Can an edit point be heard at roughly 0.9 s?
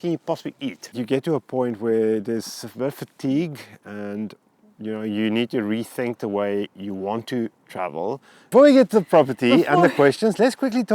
yes; 2 cuts; at 0.9 s, 8.4 s

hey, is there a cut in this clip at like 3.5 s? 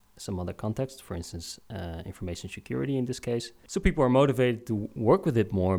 yes; 1 cut; at 3.5 s

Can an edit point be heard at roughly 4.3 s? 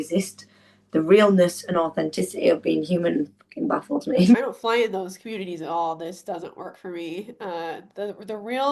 yes; 1 cut; at 4.3 s

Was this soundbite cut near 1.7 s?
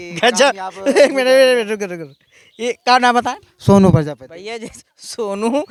no; 0 cuts

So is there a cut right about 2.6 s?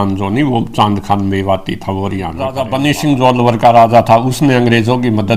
yes; 1 cut; at 2.6 s

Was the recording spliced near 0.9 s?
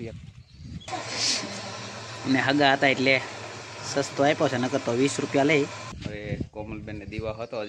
yes; 2 cuts; at 0.9 s, 5.9 s

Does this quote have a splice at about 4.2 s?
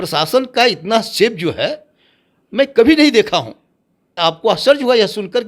yes; 1 cut; at 4.2 s

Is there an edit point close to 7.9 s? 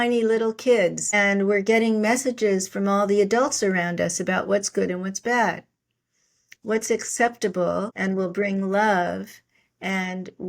yes; 2 cuts; at 1.1 s, 7.9 s

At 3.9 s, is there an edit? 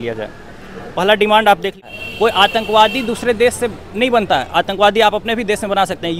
no; 1 cut; at 1.8 s

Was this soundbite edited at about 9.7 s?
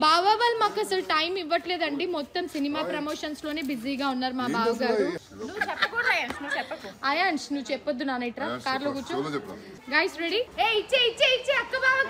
yes; 2 cuts; at 5.2 s, 9.7 s

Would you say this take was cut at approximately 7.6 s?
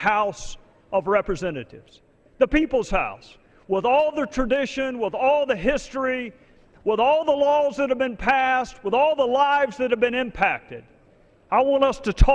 yes; 1 cut; at 7.6 s

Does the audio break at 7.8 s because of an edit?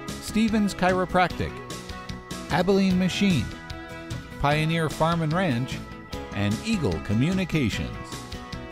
yes; 1 cut; at 7.8 s

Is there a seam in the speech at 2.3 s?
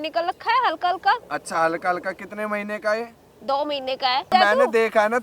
no; 1 cut; at 4.3 s

